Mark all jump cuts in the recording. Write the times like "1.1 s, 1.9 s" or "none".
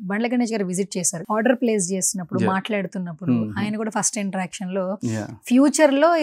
1.2 s